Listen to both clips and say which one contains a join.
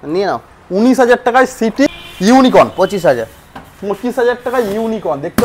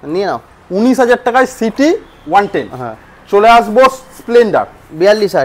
first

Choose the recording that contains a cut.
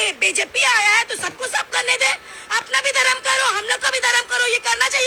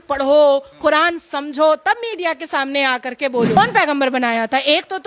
second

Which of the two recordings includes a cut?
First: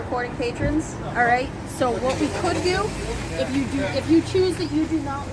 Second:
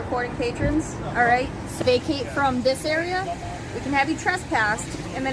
second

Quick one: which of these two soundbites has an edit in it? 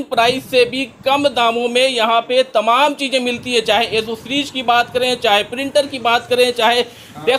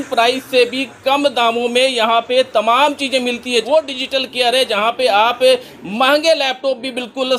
second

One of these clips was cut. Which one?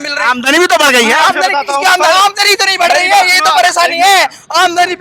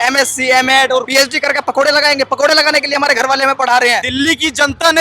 second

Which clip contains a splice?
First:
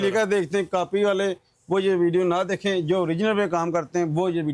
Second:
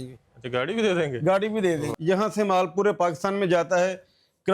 second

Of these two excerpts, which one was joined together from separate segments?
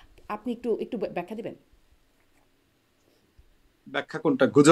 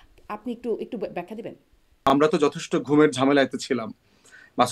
second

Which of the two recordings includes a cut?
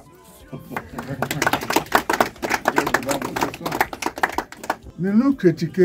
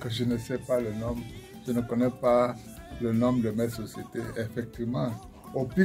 first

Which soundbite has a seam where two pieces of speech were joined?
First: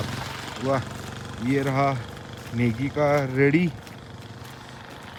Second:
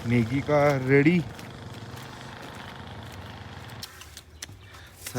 second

